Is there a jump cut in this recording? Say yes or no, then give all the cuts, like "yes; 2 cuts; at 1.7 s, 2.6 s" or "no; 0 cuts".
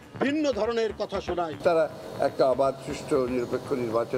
yes; 1 cut; at 1.5 s